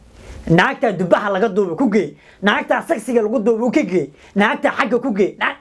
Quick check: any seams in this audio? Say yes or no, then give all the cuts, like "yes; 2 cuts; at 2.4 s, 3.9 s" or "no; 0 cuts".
no; 0 cuts